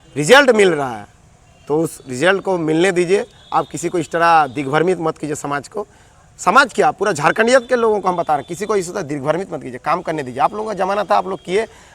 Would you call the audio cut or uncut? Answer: uncut